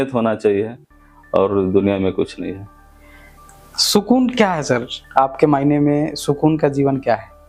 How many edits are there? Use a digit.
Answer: 0